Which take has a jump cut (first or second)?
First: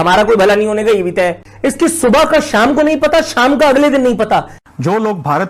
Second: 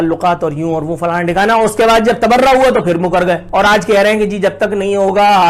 first